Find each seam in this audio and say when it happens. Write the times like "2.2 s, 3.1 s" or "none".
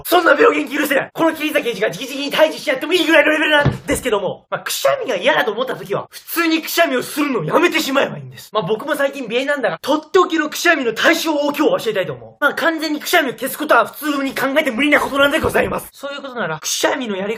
2.2 s